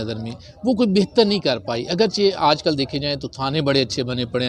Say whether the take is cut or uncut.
uncut